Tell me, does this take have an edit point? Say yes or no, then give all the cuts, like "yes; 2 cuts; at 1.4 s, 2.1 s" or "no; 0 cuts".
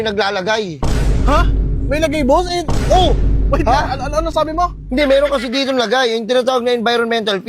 no; 0 cuts